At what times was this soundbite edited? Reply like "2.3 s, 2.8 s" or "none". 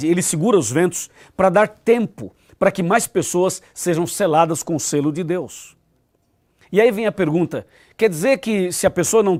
none